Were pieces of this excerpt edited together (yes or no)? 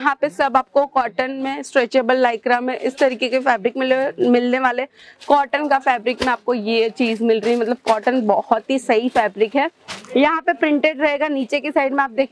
no